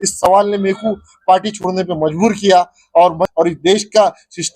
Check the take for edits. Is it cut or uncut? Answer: cut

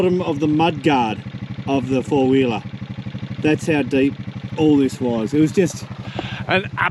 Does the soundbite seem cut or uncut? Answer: uncut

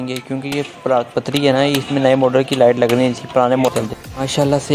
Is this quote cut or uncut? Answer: cut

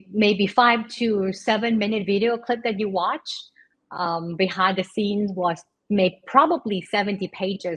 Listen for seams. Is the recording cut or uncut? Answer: uncut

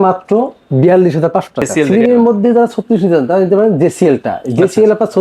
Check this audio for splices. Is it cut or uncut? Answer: cut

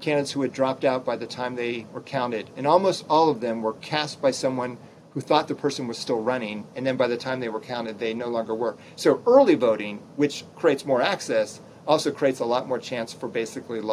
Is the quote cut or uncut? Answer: uncut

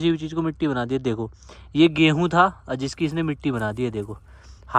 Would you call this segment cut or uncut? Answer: uncut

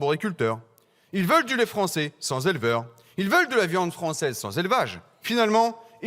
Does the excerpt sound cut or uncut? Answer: uncut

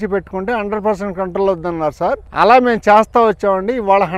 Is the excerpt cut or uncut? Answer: cut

